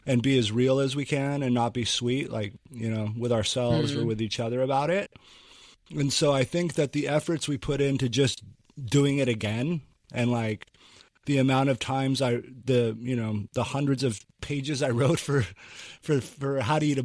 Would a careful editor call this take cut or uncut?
uncut